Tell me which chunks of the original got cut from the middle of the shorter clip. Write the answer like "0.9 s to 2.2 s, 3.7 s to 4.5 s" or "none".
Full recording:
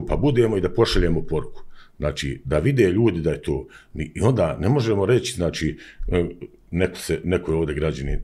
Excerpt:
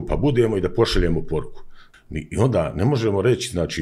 1.9 s to 3.7 s